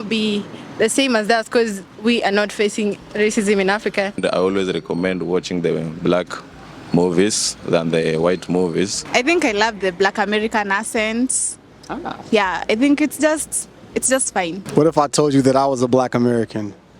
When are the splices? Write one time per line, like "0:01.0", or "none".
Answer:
0:01.9
0:04.2
0:09.0
0:14.7